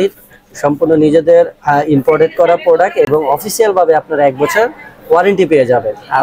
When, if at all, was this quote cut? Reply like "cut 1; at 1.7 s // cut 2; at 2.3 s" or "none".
none